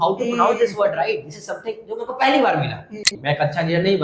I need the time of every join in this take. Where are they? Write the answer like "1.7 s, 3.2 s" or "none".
3.1 s